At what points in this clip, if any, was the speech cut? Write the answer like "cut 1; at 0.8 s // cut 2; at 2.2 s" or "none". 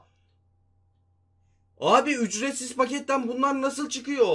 none